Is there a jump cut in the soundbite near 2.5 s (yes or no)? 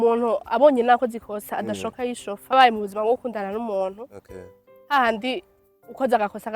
yes